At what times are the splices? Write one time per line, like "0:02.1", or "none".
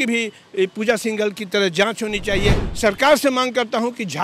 0:02.7